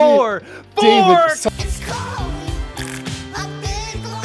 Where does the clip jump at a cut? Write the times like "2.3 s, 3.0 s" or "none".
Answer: 1.5 s